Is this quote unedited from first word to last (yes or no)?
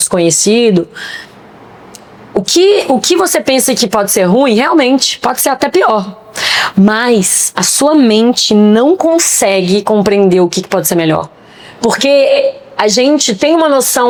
yes